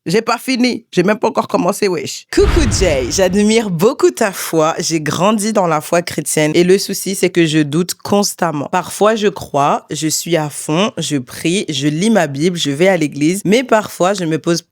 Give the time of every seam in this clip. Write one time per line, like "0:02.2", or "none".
0:02.1